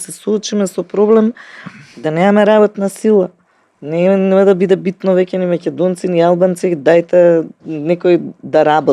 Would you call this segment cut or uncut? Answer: uncut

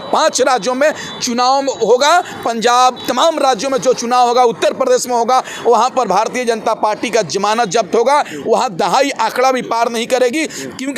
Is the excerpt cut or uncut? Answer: uncut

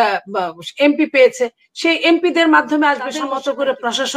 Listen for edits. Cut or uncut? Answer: cut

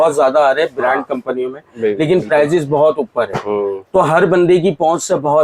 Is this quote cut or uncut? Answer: uncut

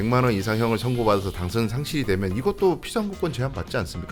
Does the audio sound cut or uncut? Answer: uncut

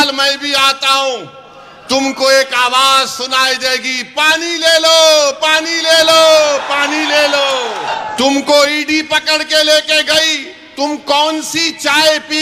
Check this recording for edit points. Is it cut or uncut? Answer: cut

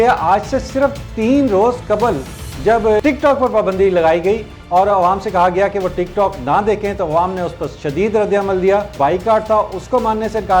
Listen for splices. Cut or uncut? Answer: cut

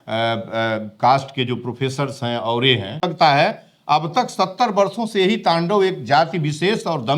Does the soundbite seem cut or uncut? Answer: cut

